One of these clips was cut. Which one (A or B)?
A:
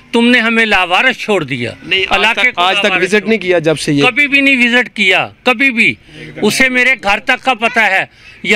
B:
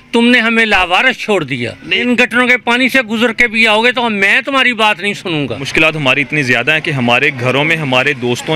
B